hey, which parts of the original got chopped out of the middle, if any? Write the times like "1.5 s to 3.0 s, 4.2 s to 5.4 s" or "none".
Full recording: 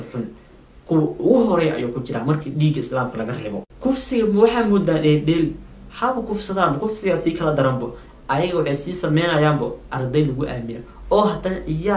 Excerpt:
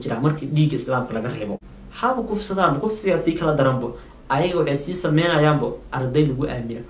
3.7 s to 5.6 s